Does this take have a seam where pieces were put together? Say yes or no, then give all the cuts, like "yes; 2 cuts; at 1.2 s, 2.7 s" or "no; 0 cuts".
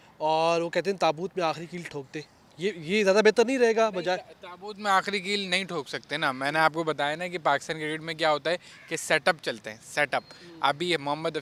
no; 0 cuts